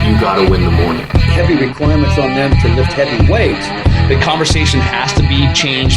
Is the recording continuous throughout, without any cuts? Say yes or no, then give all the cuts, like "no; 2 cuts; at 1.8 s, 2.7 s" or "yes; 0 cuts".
yes; 0 cuts